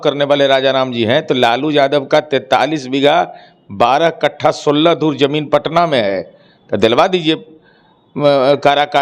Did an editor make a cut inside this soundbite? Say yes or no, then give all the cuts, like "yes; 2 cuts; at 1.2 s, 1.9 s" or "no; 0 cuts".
no; 0 cuts